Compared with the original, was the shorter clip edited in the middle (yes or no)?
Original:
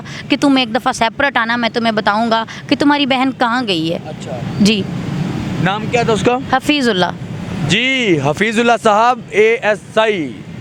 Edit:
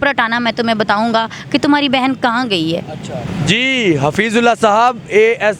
yes